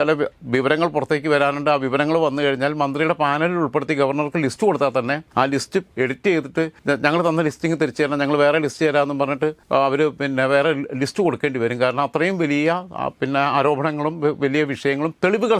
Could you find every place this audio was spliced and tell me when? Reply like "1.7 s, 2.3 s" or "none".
5.7 s, 6.8 s, 9.6 s